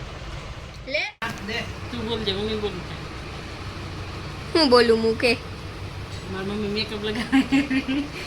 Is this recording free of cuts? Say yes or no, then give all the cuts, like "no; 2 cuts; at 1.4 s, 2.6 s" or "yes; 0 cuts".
no; 1 cut; at 1.1 s